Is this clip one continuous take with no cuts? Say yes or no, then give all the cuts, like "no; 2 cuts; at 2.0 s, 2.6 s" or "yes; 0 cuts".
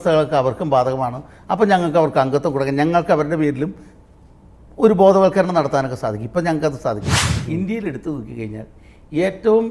no; 1 cut; at 7.2 s